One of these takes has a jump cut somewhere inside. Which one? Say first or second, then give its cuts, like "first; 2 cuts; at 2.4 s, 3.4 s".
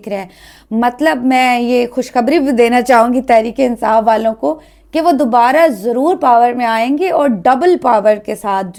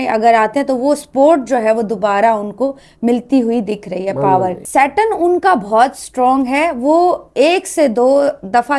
second; 1 cut; at 4.6 s